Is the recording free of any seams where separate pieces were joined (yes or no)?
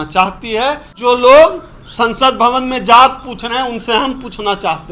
no